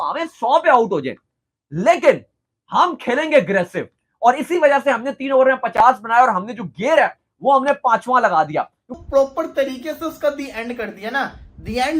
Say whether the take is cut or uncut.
cut